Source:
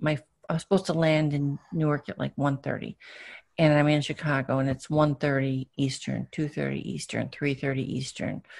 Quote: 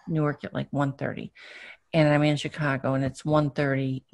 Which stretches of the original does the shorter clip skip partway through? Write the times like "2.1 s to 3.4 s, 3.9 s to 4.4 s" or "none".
none